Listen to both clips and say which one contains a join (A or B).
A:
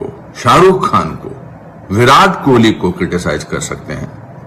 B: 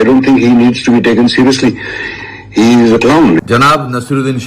B